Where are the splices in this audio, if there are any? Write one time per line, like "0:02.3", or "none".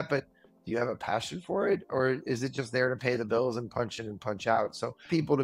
none